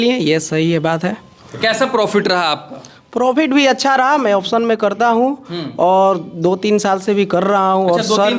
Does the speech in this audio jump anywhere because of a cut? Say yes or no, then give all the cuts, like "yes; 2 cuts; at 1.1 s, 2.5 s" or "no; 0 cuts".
no; 0 cuts